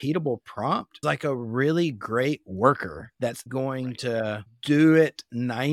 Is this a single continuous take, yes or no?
no